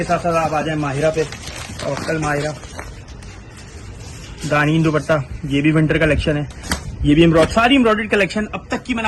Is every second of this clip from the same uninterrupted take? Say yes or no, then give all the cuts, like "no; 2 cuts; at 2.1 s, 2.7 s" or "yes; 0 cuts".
yes; 0 cuts